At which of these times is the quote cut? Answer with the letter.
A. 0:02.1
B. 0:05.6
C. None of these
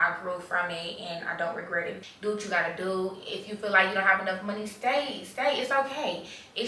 A